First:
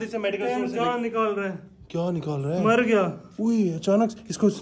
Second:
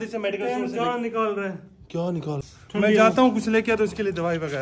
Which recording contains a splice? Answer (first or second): second